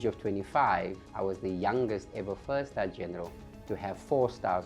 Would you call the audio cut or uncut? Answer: cut